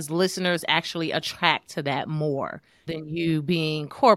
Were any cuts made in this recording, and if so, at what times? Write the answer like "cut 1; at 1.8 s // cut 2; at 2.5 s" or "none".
cut 1; at 2.9 s